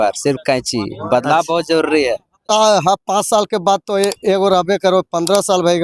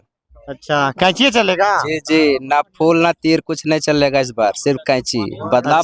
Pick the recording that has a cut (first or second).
first